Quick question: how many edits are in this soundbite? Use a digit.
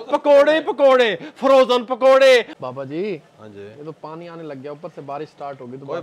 1